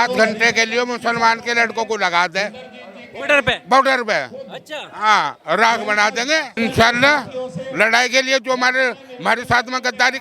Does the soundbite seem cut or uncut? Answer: cut